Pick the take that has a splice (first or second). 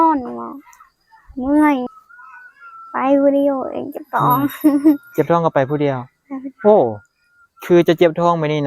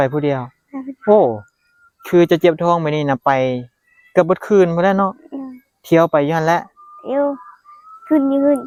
first